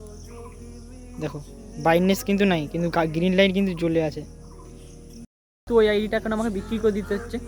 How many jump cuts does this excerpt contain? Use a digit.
1